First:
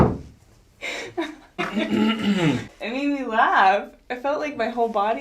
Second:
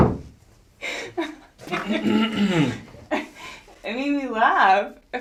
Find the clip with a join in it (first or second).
first